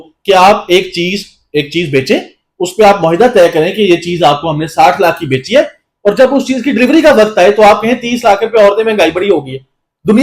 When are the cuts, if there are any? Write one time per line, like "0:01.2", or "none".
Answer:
none